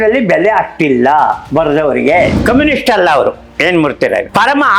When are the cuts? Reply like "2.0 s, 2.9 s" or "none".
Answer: 2.3 s

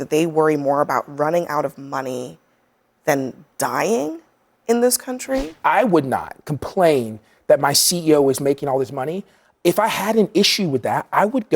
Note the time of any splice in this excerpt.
5.5 s

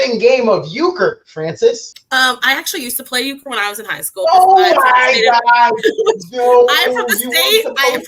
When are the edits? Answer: 1.9 s

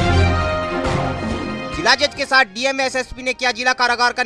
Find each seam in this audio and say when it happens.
1.5 s

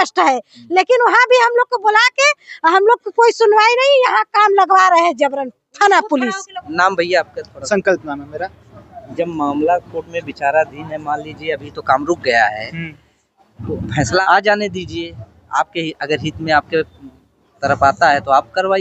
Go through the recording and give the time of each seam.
6.5 s, 14.2 s

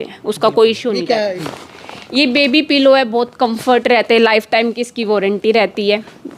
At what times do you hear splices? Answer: 1.5 s

